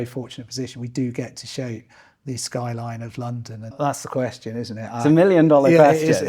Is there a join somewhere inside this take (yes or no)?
yes